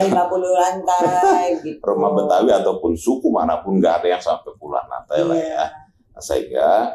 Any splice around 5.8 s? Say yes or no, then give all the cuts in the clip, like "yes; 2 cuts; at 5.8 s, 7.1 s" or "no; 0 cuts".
no; 0 cuts